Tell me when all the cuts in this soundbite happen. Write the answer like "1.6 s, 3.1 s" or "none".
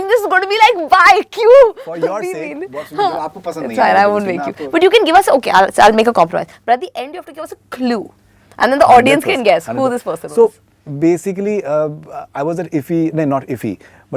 none